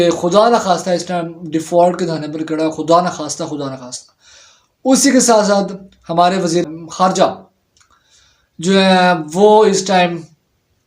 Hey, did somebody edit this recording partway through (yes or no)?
yes